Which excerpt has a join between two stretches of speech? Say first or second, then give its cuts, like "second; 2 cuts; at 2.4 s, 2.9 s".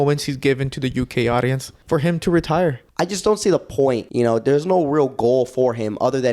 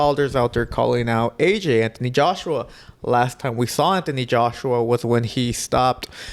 first; 3 cuts; at 1.7 s, 2.8 s, 4.1 s